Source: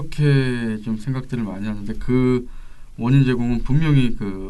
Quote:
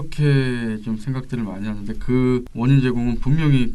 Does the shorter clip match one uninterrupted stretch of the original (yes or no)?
no